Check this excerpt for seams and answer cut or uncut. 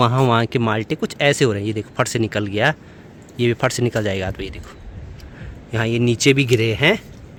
uncut